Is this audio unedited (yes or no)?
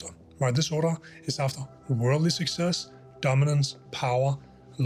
yes